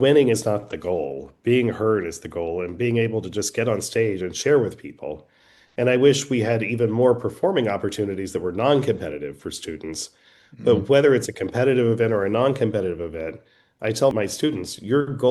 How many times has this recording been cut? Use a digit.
1